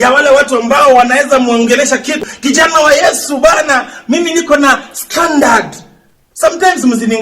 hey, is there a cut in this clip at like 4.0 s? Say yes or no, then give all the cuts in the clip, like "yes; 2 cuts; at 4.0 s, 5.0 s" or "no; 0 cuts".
no; 1 cut; at 2.2 s